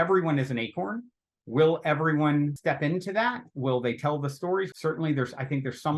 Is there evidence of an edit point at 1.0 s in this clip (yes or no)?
no